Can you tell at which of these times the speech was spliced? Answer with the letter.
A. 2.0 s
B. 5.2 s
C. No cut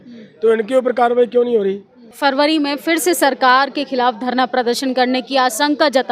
A